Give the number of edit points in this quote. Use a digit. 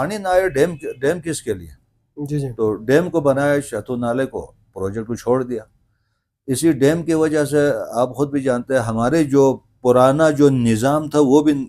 0